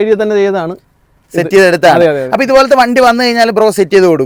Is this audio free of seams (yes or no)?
yes